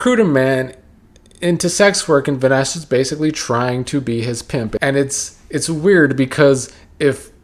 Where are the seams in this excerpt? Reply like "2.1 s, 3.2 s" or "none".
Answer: 4.8 s